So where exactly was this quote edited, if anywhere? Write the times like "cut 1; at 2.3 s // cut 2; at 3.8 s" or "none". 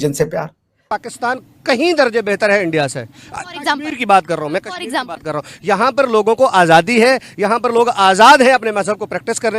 cut 1; at 1.0 s